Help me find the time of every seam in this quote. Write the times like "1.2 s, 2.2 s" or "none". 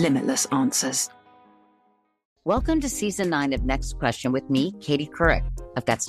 2.2 s